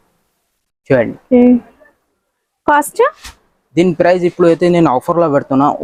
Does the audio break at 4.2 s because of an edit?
no; 0 cuts

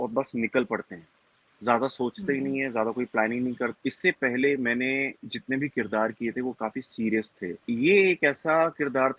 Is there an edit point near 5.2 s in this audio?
no; 2 cuts; at 3.8 s, 7.6 s

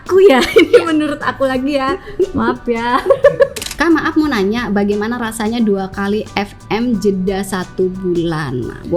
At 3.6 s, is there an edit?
yes; 1 cut; at 3.6 s

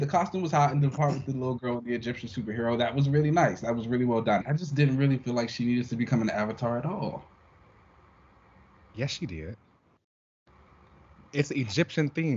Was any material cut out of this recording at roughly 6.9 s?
no; 1 cut; at 4.4 s

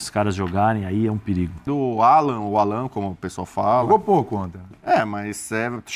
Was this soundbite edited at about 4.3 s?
no; 1 cut; at 1.6 s

